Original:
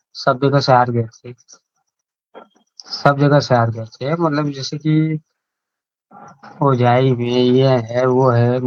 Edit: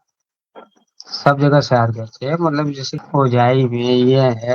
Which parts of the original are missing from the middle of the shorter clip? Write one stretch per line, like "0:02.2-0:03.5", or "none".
0:04.7-0:06.4